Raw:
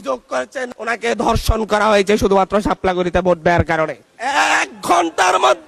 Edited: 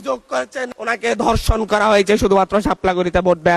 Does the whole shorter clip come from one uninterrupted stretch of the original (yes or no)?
yes